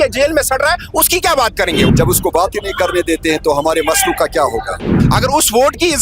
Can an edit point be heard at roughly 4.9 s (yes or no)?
yes